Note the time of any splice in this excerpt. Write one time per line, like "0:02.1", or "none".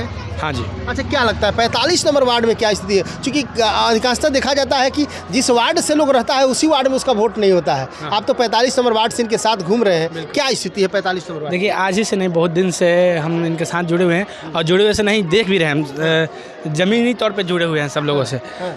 none